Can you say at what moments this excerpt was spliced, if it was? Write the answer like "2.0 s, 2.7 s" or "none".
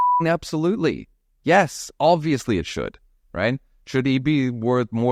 none